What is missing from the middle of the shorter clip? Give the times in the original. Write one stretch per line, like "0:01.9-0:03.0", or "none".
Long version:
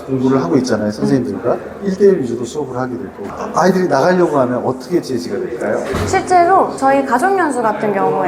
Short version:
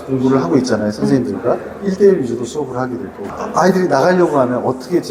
none